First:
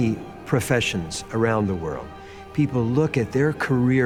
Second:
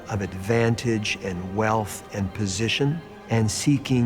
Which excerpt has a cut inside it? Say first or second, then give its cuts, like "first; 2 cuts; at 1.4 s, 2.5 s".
second; 1 cut; at 3.1 s